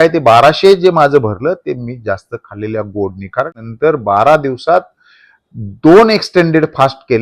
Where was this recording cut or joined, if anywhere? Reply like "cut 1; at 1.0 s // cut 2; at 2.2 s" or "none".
cut 1; at 3.6 s